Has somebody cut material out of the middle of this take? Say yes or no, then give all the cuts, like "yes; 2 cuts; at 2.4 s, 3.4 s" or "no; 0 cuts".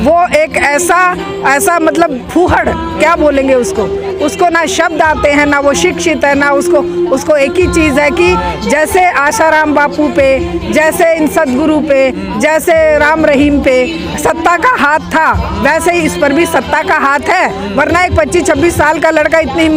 no; 0 cuts